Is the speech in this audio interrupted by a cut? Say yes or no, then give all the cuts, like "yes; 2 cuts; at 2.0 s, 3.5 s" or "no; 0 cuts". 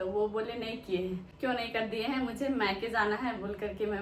yes; 1 cut; at 1.3 s